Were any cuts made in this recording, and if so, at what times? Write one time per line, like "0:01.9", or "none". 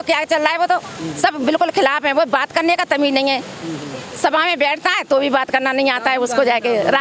none